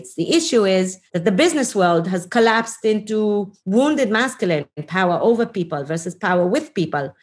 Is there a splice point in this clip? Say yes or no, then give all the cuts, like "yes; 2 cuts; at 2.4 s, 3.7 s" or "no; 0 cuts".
yes; 3 cuts; at 1.0 s, 3.6 s, 4.8 s